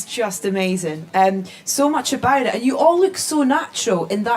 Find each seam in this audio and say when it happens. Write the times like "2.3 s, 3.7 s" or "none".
none